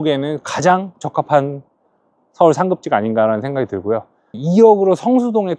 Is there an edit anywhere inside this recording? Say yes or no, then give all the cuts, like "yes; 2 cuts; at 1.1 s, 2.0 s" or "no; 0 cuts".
yes; 1 cut; at 4.4 s